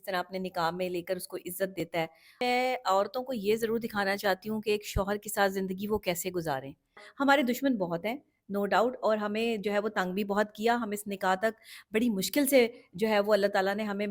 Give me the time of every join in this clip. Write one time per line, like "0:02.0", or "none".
0:02.4
0:07.1